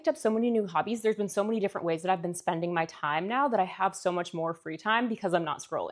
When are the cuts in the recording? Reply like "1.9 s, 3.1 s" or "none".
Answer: none